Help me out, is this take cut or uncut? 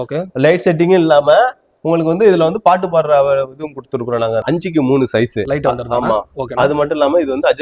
cut